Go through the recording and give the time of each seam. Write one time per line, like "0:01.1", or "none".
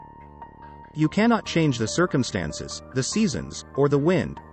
0:00.9